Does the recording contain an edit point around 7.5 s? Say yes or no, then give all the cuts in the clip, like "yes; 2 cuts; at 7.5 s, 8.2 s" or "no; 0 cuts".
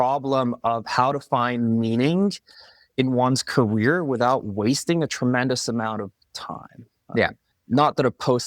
yes; 1 cut; at 7.5 s